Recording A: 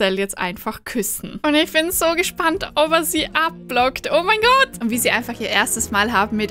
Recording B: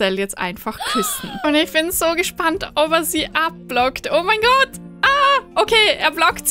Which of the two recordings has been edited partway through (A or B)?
A